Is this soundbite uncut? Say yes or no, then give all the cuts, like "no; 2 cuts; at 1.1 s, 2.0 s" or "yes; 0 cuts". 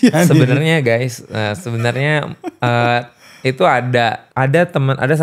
no; 1 cut; at 4.2 s